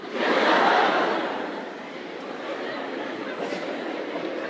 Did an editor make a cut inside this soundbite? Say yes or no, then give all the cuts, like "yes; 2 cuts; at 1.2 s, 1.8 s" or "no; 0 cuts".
no; 0 cuts